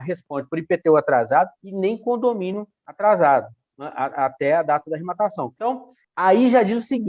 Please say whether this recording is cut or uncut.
cut